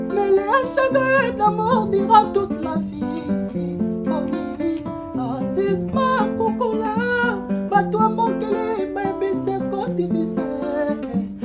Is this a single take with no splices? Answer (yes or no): yes